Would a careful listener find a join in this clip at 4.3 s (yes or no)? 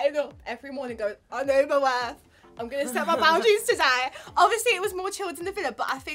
no